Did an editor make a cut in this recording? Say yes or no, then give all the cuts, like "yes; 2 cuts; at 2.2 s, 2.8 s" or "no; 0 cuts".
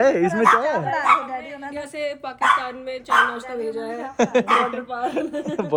no; 0 cuts